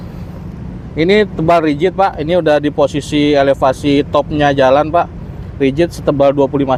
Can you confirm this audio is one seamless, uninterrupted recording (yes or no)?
yes